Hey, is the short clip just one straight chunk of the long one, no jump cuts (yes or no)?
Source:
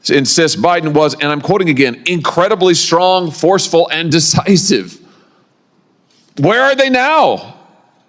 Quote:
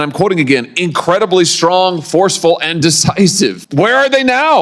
no